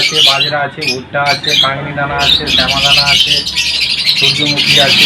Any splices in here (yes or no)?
no